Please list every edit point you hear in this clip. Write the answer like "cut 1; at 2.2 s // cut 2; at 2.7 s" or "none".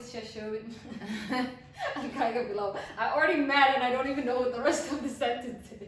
none